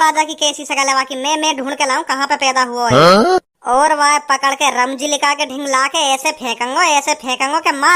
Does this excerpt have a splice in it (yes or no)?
no